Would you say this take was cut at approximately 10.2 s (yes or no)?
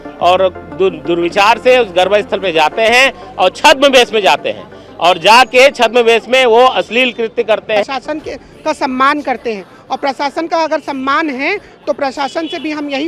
no